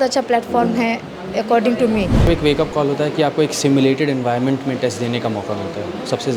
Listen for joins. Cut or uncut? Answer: cut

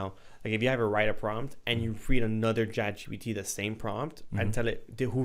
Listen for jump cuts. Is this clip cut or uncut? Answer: uncut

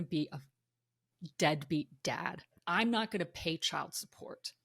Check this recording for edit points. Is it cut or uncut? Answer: cut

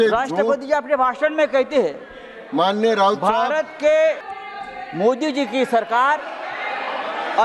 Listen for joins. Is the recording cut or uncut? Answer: cut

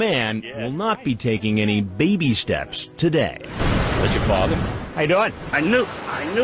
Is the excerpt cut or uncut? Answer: cut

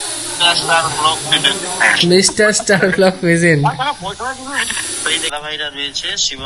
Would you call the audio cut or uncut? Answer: cut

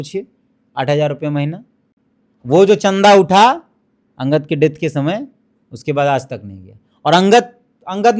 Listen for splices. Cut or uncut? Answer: uncut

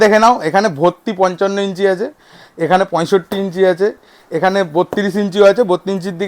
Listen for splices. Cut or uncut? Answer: uncut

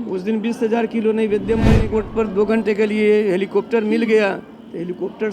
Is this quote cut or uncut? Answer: cut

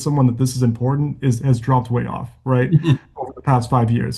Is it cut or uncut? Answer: uncut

